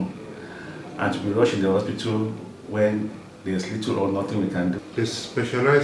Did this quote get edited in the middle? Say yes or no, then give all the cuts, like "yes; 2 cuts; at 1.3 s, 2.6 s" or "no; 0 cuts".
yes; 1 cut; at 4.9 s